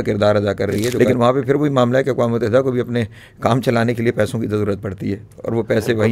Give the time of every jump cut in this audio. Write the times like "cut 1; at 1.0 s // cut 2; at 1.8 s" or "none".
cut 1; at 0.9 s